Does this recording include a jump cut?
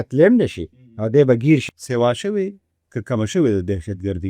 yes; 1 cut; at 1.7 s

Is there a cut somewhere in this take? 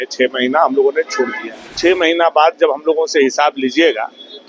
yes; 1 cut; at 1.7 s

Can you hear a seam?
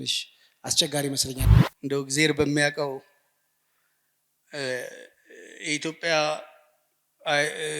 yes; 1 cut; at 1.4 s

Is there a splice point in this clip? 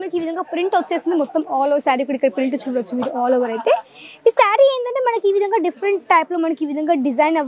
no; 0 cuts

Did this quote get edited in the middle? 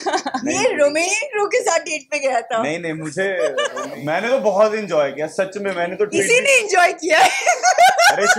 yes; 1 cut; at 3.9 s

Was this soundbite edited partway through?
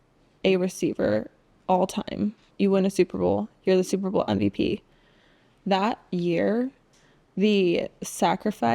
yes; 1 cut; at 2.5 s

